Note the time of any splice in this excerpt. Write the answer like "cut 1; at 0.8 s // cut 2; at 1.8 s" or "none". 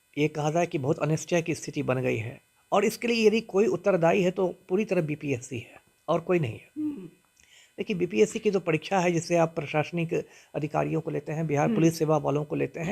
none